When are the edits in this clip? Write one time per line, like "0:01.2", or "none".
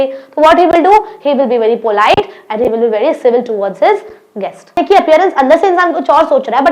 0:04.8